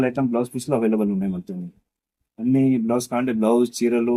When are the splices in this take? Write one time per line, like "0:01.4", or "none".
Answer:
none